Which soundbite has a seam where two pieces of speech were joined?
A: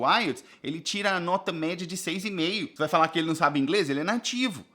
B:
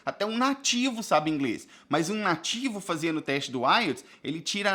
A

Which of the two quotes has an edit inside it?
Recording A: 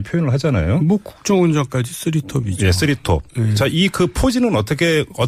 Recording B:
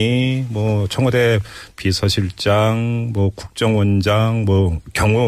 A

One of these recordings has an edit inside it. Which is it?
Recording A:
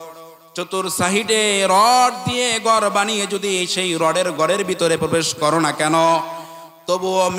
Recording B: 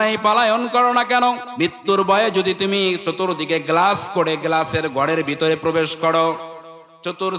B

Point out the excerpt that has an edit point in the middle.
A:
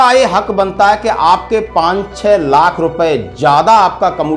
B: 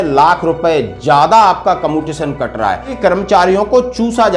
B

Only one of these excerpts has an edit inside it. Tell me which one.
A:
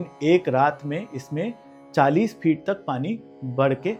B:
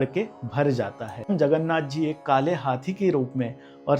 B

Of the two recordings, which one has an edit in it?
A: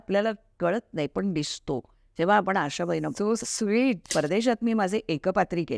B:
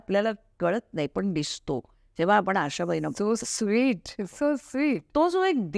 A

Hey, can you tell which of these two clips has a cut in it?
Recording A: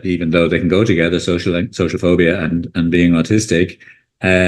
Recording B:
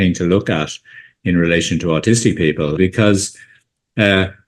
B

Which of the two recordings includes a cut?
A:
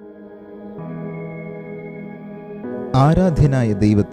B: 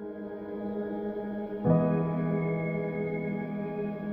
A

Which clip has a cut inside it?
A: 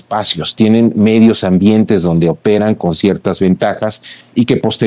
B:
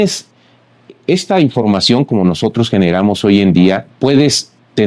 B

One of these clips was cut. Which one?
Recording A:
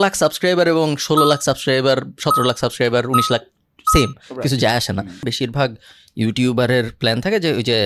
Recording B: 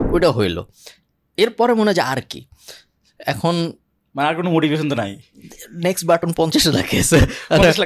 A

